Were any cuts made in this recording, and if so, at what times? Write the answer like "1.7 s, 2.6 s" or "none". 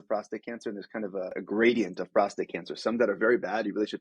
1.3 s